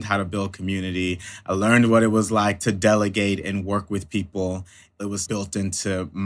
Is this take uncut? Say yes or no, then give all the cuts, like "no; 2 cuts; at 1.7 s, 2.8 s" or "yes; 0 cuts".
no; 2 cuts; at 2.6 s, 5.0 s